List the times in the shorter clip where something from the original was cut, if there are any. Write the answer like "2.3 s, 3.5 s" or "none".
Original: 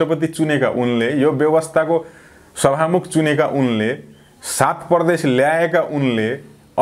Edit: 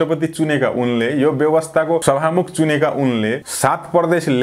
2.0 s, 3.5 s